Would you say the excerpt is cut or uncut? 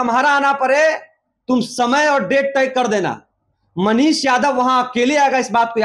uncut